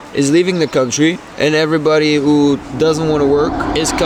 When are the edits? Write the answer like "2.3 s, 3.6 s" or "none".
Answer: none

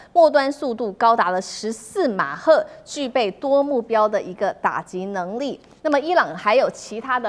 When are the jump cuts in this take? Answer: none

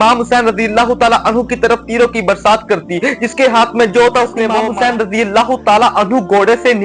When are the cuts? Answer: 4.6 s

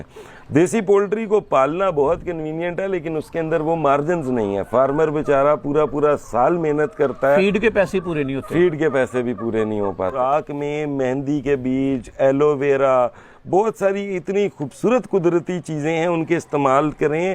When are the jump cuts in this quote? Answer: 10.2 s

